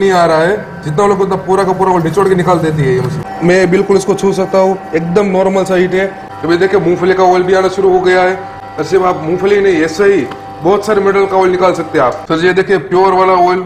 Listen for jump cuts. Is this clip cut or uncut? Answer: cut